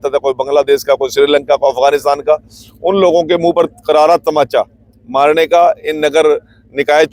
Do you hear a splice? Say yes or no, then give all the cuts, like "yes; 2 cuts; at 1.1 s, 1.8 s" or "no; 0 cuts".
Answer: no; 0 cuts